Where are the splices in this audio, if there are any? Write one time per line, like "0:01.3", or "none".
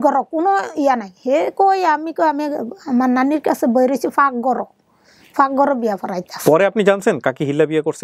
none